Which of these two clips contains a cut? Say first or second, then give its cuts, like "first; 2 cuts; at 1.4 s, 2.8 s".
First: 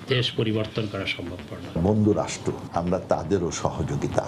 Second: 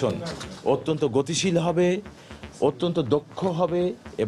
first; 2 cuts; at 1.8 s, 2.6 s